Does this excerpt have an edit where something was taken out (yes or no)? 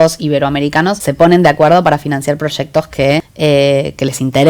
yes